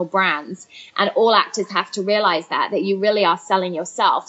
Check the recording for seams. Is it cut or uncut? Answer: uncut